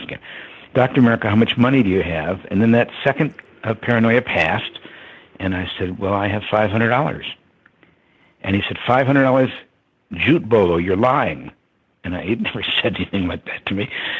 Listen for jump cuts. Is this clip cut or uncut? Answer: cut